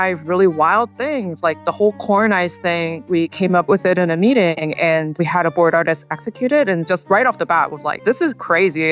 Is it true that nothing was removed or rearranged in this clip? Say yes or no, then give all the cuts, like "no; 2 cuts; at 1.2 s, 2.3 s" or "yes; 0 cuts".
yes; 0 cuts